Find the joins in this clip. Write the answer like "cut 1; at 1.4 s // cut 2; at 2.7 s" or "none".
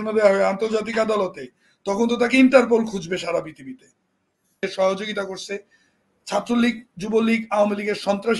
cut 1; at 4.6 s